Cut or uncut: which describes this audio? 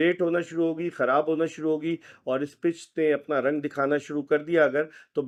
uncut